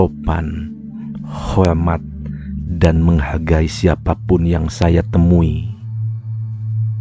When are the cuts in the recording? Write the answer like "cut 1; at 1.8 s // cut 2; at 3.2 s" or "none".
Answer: cut 1; at 5.6 s

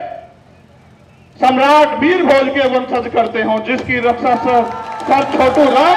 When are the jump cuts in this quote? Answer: none

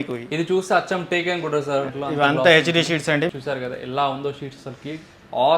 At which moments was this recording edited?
cut 1; at 1.9 s // cut 2; at 3.3 s

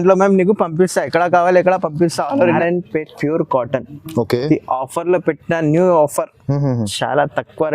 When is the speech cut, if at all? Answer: cut 1; at 2.6 s

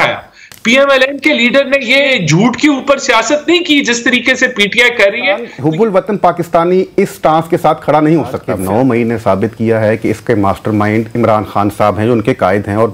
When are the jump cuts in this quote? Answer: cut 1; at 2.1 s // cut 2; at 5.5 s // cut 3; at 8.5 s

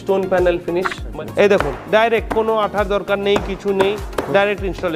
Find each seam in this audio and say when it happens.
cut 1; at 1.0 s

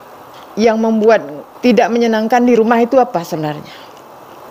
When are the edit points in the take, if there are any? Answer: cut 1; at 1.5 s

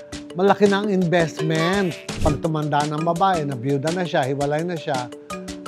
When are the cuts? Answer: cut 1; at 2.0 s

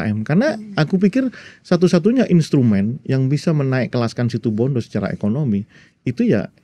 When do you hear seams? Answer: none

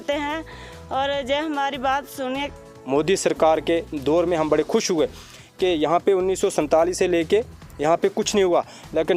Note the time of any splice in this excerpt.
cut 1; at 2.6 s

